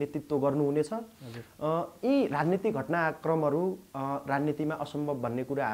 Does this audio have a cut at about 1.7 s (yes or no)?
no